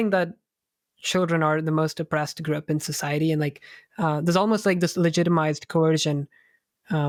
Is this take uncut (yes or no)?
yes